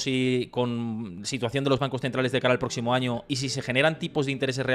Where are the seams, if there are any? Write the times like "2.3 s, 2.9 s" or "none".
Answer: none